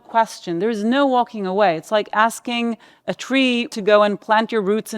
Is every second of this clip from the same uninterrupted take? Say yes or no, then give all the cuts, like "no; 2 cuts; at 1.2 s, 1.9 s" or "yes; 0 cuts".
no; 1 cut; at 3.7 s